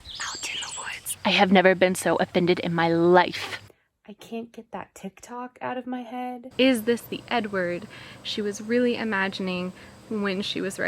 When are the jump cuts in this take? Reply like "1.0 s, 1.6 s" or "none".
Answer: 1.0 s, 3.7 s, 6.5 s